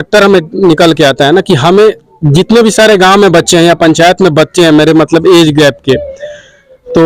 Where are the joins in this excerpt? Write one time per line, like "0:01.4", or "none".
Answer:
none